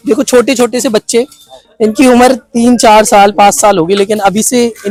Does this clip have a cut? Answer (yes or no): no